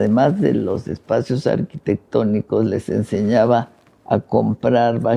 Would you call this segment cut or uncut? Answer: uncut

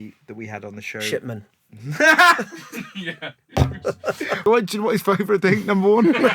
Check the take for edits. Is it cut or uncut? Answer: cut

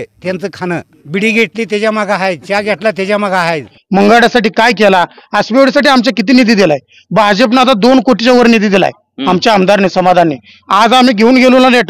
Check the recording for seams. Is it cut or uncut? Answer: cut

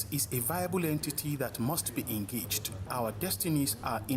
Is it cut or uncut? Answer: cut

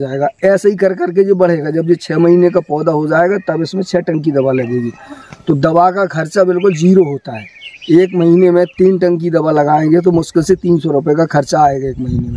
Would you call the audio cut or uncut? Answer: uncut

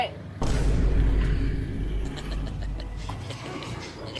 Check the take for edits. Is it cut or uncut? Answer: uncut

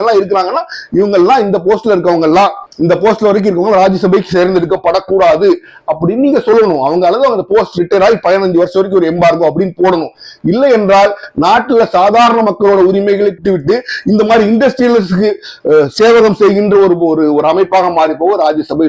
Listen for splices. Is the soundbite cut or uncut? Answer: uncut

